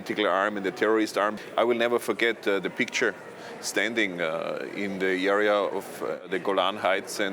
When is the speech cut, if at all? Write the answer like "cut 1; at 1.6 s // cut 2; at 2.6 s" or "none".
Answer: cut 1; at 1.4 s // cut 2; at 6.3 s